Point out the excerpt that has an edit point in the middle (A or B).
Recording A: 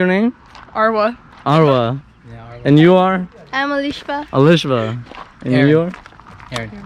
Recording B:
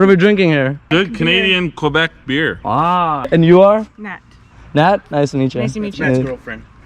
B